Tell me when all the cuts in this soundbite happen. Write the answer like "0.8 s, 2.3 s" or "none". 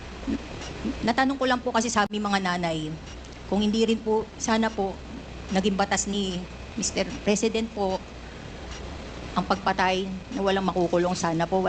none